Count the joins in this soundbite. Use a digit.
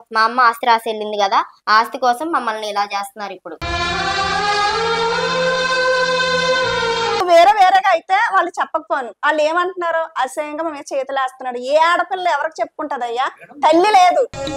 1